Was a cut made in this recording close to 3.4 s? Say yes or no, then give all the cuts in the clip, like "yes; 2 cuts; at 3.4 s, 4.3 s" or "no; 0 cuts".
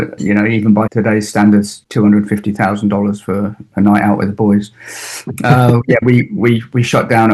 no; 2 cuts; at 0.9 s, 1.8 s